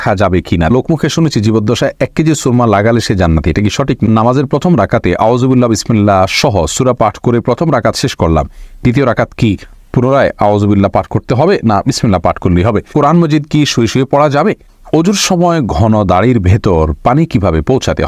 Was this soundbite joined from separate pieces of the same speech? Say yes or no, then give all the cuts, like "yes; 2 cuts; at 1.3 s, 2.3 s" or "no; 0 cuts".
yes; 4 cuts; at 0.7 s, 4.0 s, 12.9 s, 14.7 s